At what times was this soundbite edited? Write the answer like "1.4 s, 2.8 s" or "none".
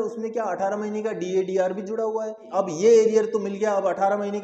2.4 s